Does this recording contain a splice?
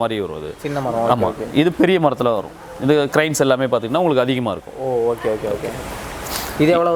no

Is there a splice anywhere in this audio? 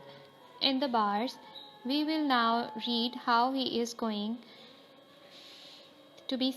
yes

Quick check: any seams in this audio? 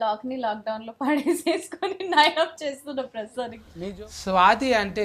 yes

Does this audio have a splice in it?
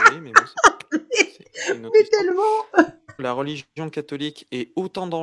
yes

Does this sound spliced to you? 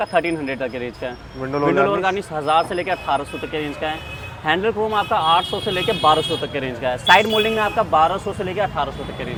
no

